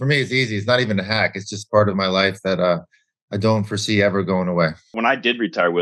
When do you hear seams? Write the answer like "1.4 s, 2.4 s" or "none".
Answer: 4.9 s

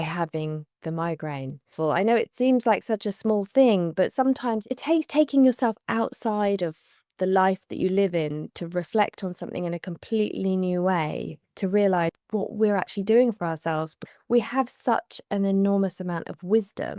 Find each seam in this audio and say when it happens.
1.7 s, 4.7 s

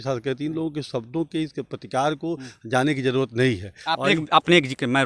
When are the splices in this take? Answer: none

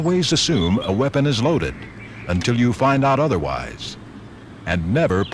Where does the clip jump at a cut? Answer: none

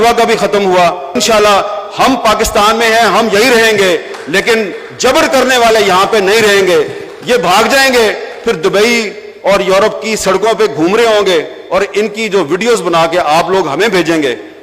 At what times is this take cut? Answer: 1.1 s

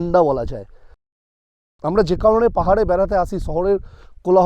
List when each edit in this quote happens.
1.4 s

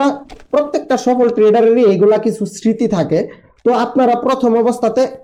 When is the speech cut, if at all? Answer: none

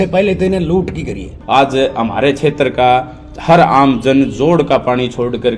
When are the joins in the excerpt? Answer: 1.3 s

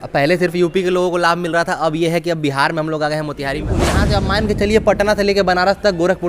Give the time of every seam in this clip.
3.9 s

